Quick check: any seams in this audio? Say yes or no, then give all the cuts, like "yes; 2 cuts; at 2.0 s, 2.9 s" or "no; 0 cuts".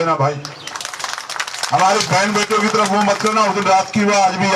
no; 0 cuts